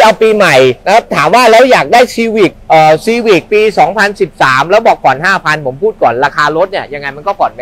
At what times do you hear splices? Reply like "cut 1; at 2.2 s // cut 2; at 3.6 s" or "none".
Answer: cut 1; at 0.8 s // cut 2; at 3.5 s